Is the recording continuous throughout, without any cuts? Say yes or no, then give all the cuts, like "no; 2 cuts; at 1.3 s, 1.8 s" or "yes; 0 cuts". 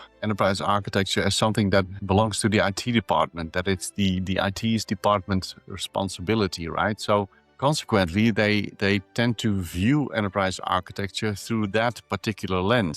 yes; 0 cuts